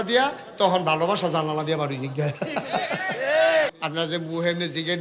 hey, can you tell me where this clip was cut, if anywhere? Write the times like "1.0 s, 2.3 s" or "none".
3.7 s